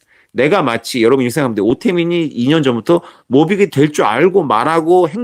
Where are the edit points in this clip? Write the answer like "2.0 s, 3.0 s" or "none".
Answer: none